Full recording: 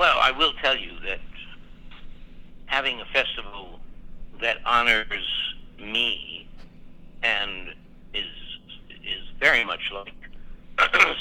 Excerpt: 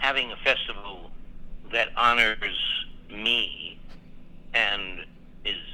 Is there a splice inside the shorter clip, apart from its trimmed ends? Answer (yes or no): no